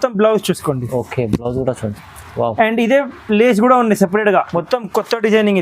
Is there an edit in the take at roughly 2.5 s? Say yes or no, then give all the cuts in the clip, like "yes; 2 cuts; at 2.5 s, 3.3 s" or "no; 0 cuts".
no; 1 cut; at 4.5 s